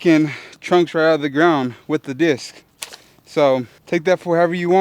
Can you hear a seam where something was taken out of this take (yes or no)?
yes